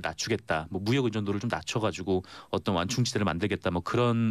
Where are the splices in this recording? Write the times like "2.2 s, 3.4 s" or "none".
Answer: none